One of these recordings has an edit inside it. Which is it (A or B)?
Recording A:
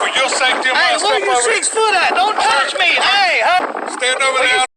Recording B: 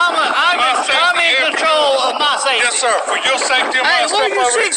A